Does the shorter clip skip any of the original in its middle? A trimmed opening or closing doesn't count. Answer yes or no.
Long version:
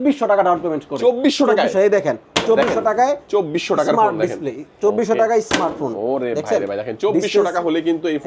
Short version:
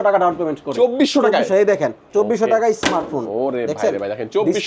yes